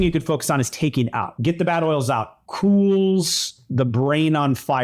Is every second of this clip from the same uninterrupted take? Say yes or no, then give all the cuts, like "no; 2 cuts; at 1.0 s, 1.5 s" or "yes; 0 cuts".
no; 1 cut; at 1.4 s